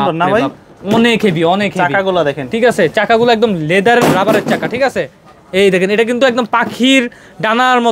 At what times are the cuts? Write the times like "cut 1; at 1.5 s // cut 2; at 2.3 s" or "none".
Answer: none